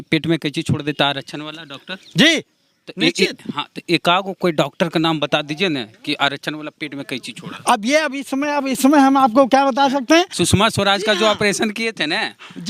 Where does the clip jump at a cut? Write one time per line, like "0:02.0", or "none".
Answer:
0:10.4